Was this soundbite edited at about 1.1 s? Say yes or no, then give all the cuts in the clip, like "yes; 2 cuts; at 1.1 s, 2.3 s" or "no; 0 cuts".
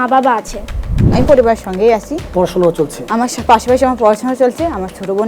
yes; 1 cut; at 1.1 s